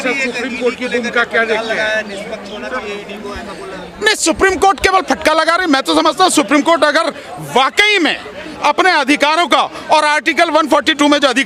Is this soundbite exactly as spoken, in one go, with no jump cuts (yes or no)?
yes